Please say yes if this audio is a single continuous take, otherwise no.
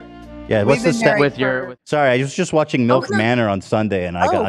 no